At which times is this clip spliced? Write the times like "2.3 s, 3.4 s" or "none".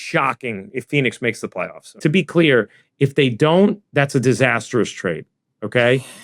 2.0 s